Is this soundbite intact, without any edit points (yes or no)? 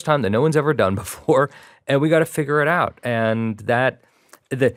yes